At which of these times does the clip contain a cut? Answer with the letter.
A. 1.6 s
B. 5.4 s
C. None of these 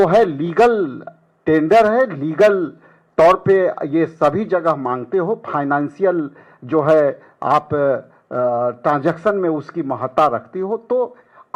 C